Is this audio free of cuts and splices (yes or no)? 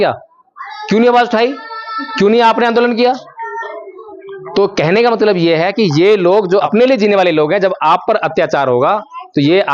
no